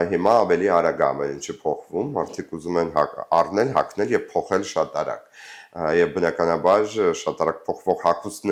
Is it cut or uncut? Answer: uncut